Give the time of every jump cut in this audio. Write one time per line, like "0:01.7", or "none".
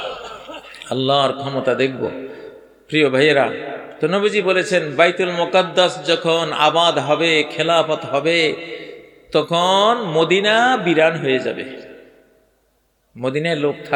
none

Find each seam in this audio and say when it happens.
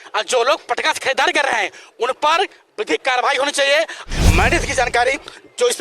0:04.0

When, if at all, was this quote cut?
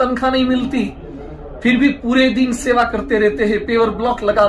none

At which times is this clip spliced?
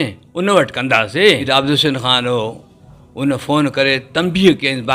0:01.4

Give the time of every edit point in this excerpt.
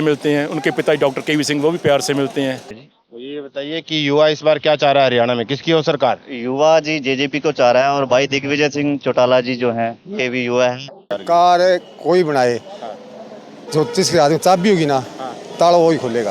0:02.8
0:11.1

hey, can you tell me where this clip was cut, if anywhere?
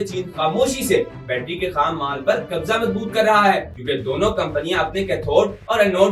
0:03.7

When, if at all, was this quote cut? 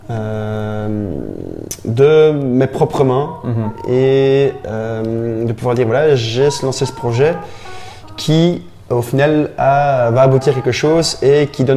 none

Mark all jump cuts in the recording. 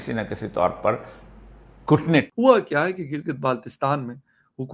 0:02.3

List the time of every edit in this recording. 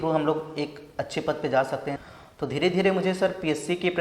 0:02.0

